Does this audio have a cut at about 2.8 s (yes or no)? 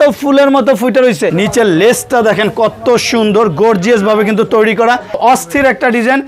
no